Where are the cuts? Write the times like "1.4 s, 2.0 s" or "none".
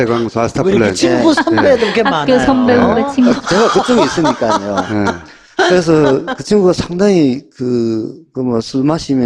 2.7 s

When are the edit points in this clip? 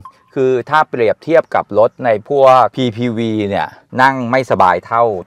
3.8 s

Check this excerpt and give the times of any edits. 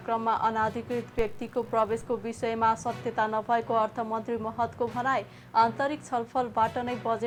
none

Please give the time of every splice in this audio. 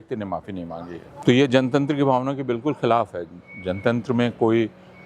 1.0 s

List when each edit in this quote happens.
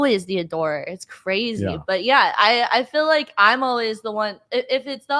none

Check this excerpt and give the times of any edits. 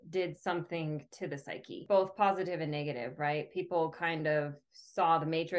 1.8 s

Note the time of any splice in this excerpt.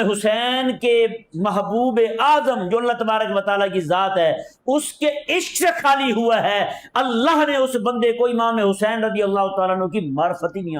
none

